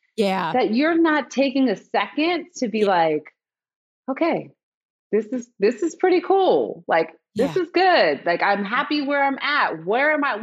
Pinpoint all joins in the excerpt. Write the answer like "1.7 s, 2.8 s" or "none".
none

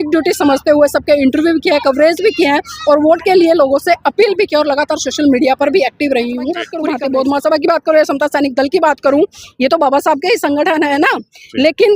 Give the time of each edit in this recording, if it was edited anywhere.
6.9 s

